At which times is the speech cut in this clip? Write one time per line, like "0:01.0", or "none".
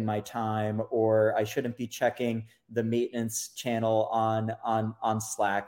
none